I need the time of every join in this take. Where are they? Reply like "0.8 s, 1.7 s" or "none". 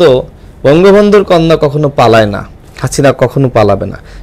none